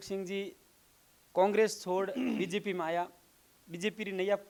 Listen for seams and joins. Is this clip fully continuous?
yes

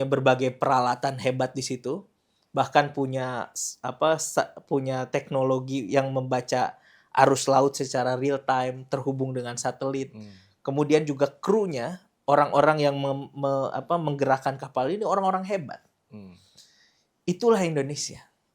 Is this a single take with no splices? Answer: yes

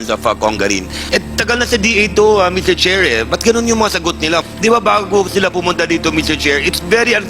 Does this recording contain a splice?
yes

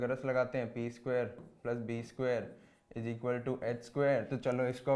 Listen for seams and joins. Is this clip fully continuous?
yes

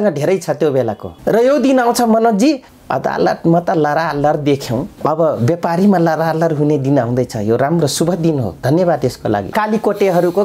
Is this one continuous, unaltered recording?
no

